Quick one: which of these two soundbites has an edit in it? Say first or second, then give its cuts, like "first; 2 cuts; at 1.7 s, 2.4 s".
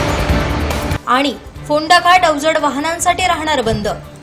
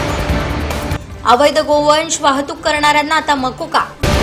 first; 1 cut; at 0.9 s